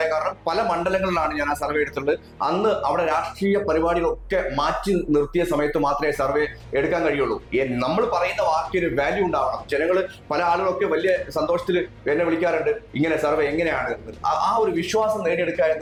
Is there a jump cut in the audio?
no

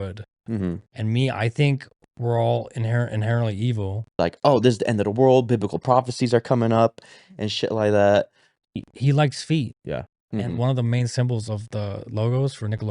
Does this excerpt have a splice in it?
yes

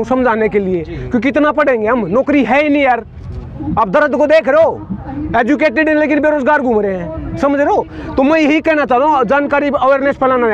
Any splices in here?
no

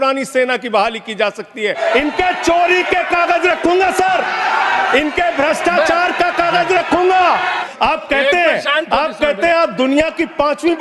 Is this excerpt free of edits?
no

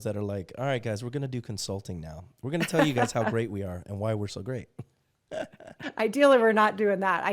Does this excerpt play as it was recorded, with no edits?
no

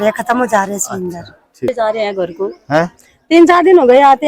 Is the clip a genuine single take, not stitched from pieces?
no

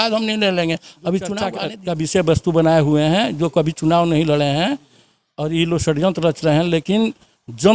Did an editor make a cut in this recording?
yes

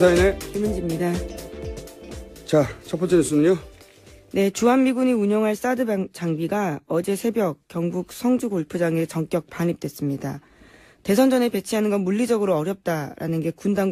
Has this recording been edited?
yes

